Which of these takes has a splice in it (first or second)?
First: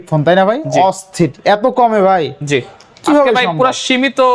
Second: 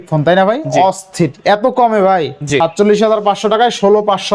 second